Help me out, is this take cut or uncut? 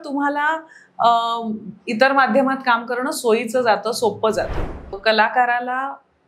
cut